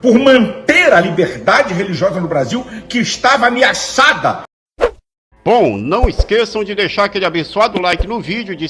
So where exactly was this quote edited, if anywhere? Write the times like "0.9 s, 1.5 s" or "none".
4.5 s